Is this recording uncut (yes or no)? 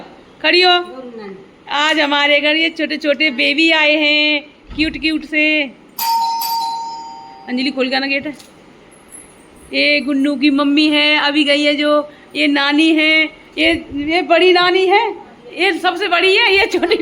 yes